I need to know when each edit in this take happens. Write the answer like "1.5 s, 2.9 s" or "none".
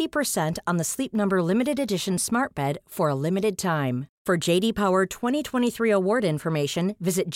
none